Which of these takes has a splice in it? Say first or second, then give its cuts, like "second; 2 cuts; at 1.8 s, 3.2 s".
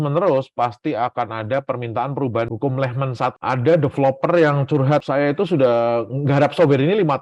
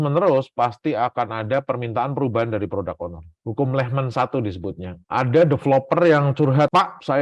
first; 3 cuts; at 2.5 s, 3.3 s, 5.0 s